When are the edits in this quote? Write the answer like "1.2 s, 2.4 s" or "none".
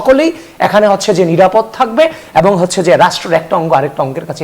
none